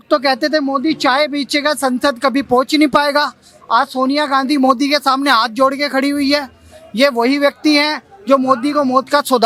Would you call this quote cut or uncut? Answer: uncut